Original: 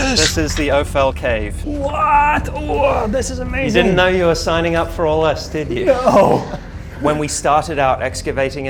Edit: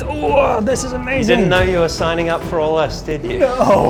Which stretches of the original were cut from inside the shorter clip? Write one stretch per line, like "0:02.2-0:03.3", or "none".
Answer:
none